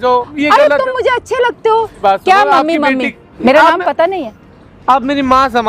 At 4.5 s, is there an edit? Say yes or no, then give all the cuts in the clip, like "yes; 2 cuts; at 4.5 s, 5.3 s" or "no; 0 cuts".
no; 2 cuts; at 2.0 s, 3.2 s